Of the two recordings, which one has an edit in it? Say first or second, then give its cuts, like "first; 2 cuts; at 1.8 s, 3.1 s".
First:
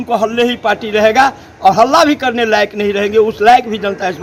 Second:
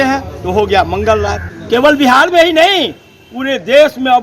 second; 1 cut; at 1.5 s